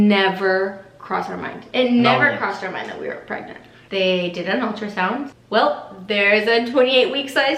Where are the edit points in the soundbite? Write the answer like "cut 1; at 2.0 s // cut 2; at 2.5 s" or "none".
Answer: cut 1; at 3.8 s // cut 2; at 5.4 s